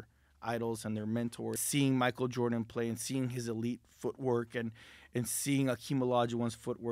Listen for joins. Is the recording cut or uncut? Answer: cut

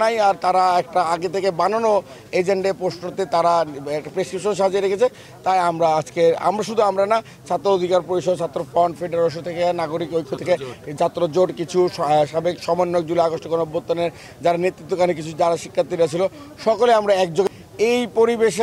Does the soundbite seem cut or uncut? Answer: uncut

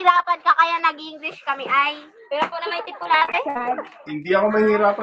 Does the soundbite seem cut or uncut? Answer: uncut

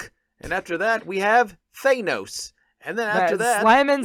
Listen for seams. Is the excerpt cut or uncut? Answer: uncut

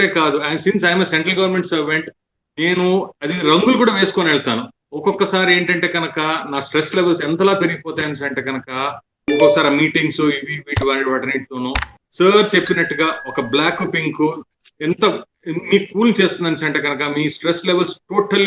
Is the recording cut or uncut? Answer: uncut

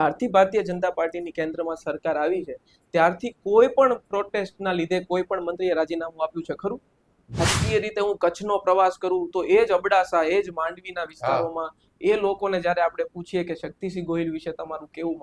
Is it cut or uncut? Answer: cut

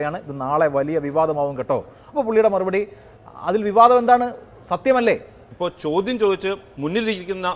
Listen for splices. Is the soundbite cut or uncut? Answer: cut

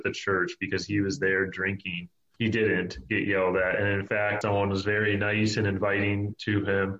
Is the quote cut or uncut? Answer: cut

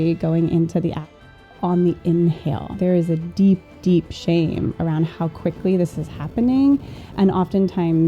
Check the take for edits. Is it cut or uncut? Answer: cut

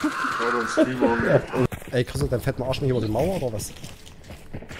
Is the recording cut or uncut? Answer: cut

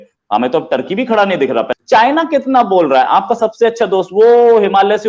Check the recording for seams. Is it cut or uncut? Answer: cut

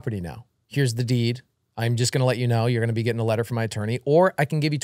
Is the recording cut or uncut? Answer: uncut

